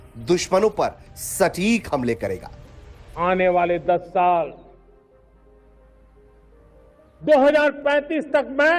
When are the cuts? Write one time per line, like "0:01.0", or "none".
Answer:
none

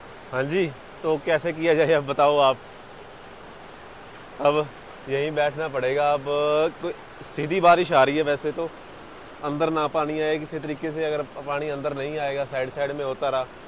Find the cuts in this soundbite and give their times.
none

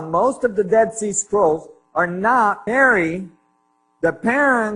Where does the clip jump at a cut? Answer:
none

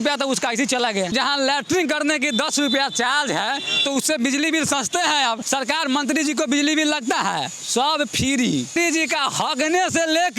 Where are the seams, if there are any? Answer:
0:01.1
0:05.4
0:08.8

